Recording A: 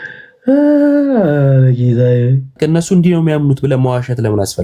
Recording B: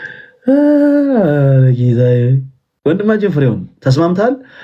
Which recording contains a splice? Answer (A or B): A